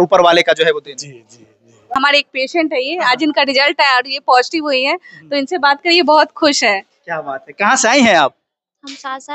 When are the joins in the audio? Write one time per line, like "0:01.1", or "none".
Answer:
0:02.0